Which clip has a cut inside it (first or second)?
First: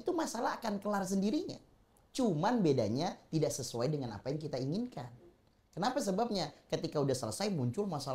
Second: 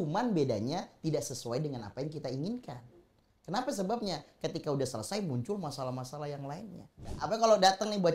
second